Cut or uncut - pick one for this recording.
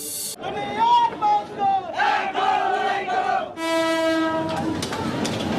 uncut